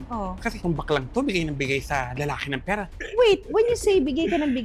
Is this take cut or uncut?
cut